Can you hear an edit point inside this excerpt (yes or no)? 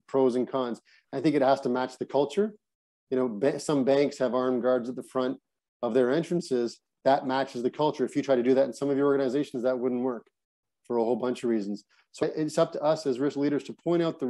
no